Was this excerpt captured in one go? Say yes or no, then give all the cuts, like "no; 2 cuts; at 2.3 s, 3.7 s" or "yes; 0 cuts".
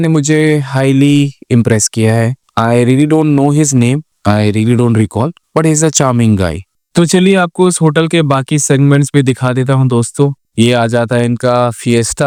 yes; 0 cuts